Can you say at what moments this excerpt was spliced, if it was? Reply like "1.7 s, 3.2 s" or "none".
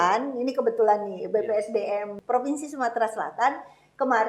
2.1 s